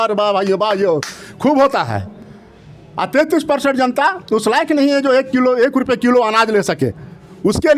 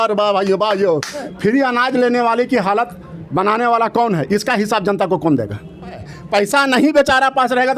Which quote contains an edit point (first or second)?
second